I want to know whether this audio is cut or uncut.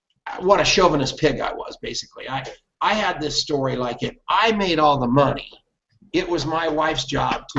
uncut